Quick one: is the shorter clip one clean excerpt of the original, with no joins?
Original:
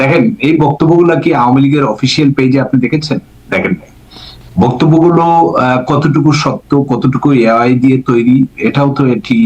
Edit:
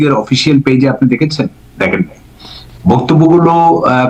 yes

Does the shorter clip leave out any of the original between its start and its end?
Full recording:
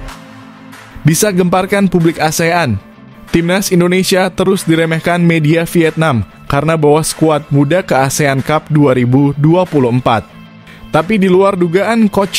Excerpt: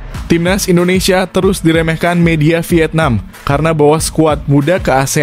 no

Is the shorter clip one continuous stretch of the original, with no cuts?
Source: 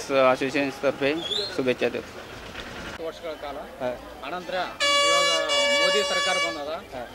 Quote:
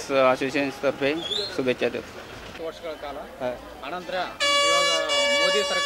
no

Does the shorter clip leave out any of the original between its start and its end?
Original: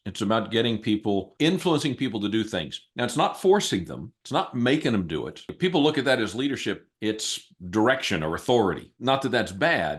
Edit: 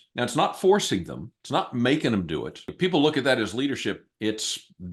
no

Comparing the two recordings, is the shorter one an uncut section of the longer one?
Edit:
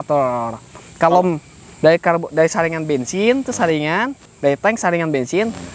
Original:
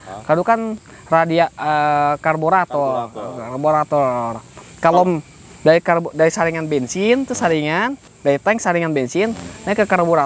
yes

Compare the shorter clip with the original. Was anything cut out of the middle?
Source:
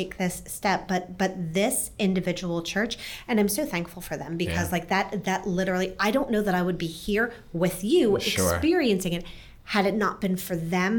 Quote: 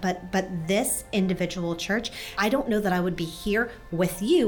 yes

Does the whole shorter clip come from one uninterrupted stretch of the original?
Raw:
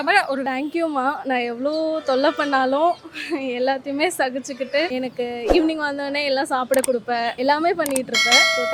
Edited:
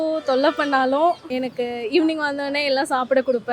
no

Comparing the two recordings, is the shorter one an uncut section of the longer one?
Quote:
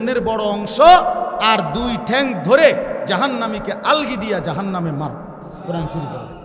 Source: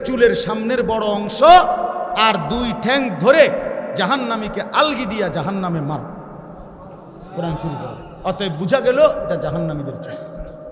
no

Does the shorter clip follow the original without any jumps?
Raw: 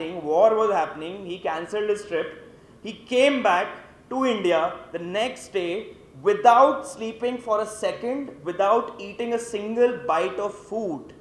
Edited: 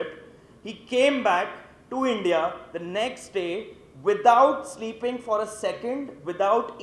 yes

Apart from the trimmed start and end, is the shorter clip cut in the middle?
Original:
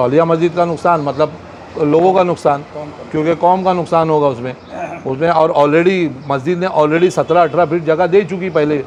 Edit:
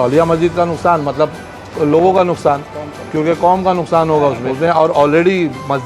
yes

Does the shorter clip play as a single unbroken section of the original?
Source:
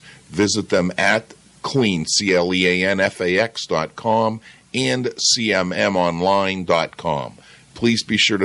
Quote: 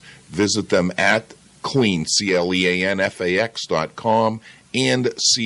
yes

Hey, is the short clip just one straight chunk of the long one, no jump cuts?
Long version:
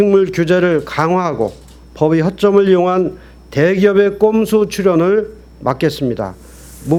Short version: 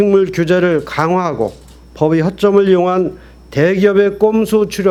yes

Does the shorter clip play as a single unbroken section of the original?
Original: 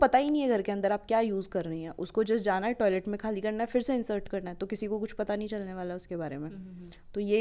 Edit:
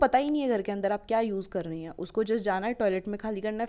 yes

